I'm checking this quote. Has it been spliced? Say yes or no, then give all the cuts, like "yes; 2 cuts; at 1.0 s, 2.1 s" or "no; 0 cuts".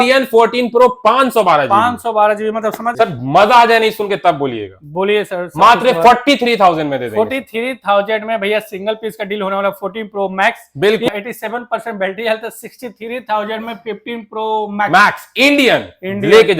yes; 2 cuts; at 2.8 s, 11.1 s